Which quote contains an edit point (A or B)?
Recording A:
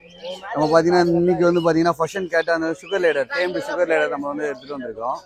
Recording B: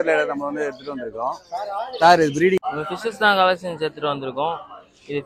B